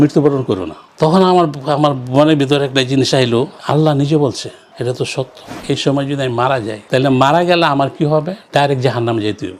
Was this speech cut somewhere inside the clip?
yes; 1 cut; at 5.6 s

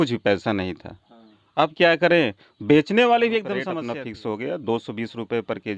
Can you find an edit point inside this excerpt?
yes; 1 cut; at 3.7 s

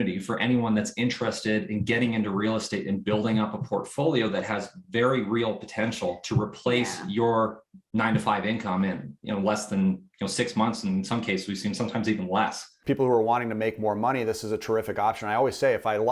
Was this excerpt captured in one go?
no; 1 cut; at 12.7 s

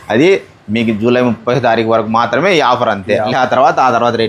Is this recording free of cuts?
no; 2 cuts; at 1.4 s, 3.3 s

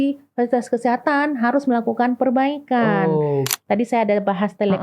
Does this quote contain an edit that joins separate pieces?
yes; 1 cut; at 3.6 s

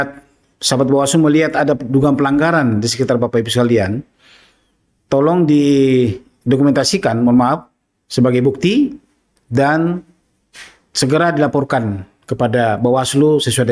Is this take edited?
no; 0 cuts

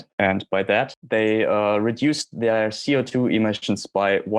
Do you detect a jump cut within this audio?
yes; 1 cut; at 1.0 s

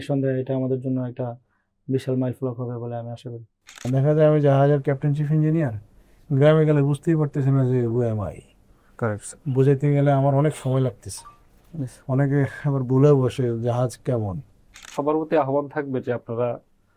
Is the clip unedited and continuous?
no; 2 cuts; at 3.8 s, 14.9 s

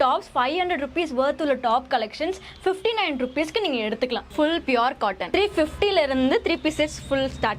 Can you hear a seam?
yes; 2 cuts; at 4.3 s, 5.2 s

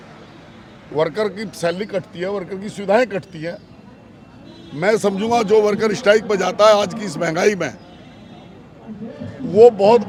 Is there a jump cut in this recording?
no; 0 cuts

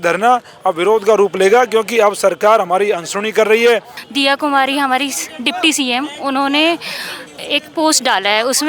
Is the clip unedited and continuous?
no; 1 cut; at 4.0 s

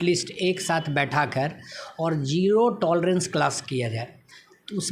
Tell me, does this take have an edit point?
no; 0 cuts

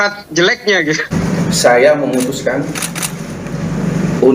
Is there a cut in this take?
yes; 1 cut; at 1.1 s

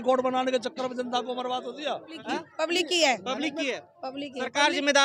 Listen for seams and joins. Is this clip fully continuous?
no; 1 cut; at 2.1 s

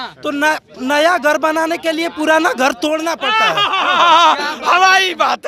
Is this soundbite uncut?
yes; 0 cuts

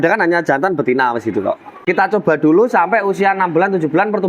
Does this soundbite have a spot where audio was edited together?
yes; 1 cut; at 1.8 s

